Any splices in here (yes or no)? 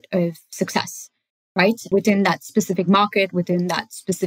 yes